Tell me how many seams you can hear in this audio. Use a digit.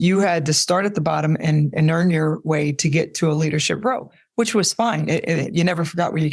0